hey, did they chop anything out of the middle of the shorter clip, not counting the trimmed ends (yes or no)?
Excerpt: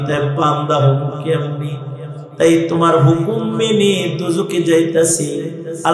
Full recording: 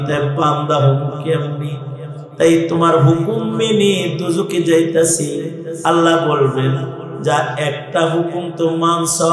no